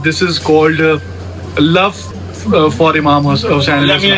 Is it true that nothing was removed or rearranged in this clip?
no; 1 cut; at 2.1 s

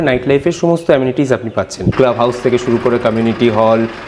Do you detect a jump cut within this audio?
yes; 1 cut; at 1.8 s

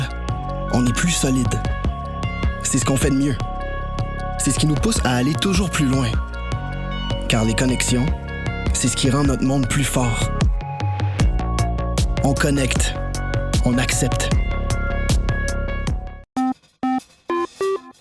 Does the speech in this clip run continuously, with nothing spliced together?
no; 1 cut; at 16.1 s

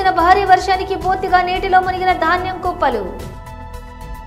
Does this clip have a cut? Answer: yes; 1 cut; at 3.3 s

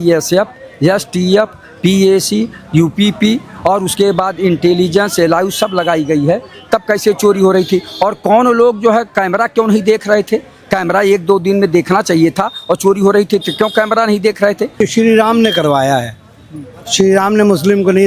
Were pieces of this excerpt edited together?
yes; 1 cut; at 14.8 s

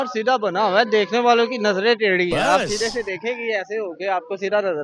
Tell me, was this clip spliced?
no; 0 cuts

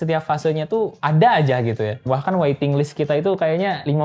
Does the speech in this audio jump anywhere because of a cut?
yes; 1 cut; at 2.0 s

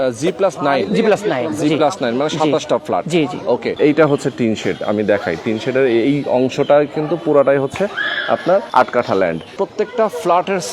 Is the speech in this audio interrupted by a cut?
yes; 3 cuts; at 3.7 s, 8.7 s, 9.5 s

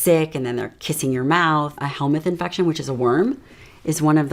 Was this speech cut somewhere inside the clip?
yes; 1 cut; at 1.8 s

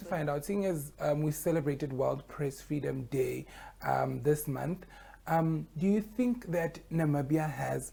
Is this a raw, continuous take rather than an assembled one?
yes; 0 cuts

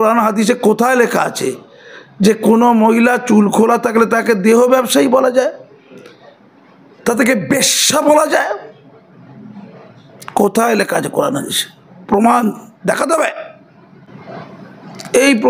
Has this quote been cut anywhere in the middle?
no; 0 cuts

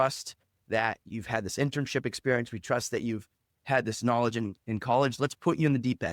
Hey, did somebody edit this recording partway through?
no; 0 cuts

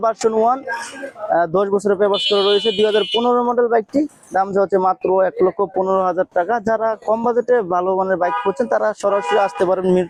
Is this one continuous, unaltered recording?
yes; 0 cuts

